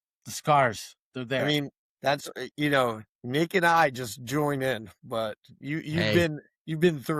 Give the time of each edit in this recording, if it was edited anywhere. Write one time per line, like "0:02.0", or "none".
0:01.8